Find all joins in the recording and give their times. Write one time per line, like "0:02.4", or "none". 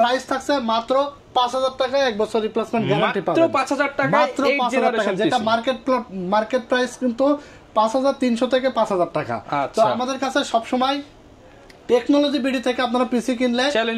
none